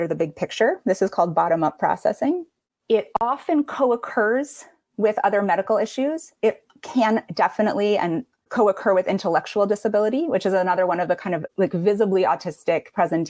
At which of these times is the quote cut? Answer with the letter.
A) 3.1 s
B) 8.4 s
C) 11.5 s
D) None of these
C